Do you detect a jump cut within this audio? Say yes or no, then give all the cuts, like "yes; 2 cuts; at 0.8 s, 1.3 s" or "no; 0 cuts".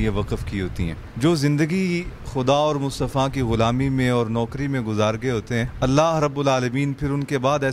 yes; 2 cuts; at 1.0 s, 5.7 s